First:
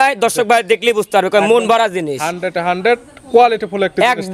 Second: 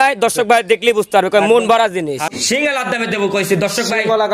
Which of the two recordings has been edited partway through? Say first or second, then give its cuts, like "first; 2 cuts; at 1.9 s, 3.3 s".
second; 1 cut; at 2.3 s